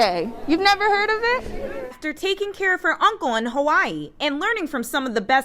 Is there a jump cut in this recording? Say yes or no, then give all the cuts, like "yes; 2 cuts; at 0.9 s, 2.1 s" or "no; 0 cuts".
yes; 1 cut; at 2.0 s